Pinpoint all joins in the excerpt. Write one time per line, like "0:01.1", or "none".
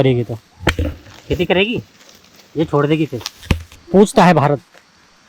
0:00.7
0:03.7